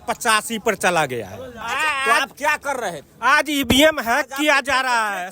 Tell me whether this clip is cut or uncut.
cut